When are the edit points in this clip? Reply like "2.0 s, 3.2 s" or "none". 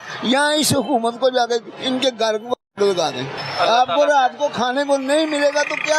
3.4 s